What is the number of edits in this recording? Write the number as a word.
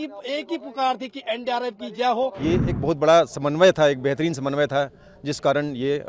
one